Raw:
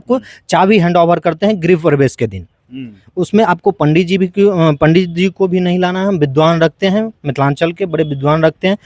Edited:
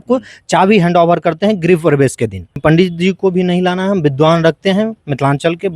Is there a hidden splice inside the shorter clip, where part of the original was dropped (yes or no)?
yes